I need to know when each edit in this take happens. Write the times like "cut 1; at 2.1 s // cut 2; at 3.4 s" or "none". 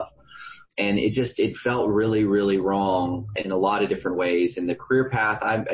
none